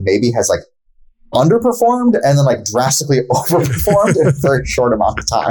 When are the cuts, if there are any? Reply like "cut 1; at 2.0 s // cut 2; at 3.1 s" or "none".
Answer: none